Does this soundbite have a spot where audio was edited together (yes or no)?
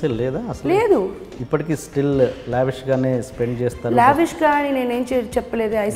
yes